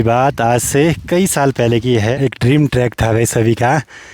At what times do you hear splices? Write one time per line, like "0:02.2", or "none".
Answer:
0:02.1